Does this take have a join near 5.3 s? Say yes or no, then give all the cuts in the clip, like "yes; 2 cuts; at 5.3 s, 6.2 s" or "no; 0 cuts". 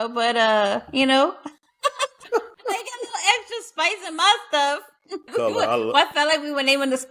yes; 2 cuts; at 2.2 s, 5.3 s